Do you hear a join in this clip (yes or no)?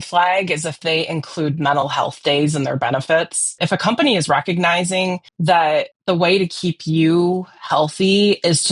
yes